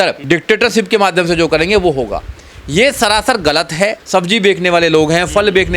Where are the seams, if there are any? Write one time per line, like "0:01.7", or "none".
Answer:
0:04.0